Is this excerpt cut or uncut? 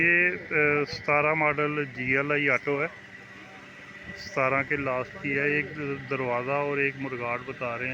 uncut